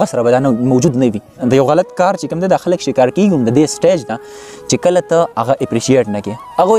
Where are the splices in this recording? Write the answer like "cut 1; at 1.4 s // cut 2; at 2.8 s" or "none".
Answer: cut 1; at 1.3 s